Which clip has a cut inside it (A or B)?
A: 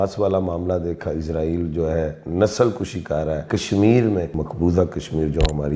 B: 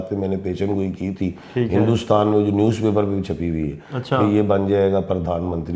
A